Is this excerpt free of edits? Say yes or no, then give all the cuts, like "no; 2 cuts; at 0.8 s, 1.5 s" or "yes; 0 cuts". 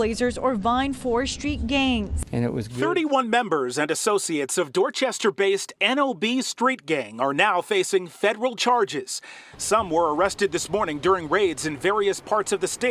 no; 1 cut; at 2.7 s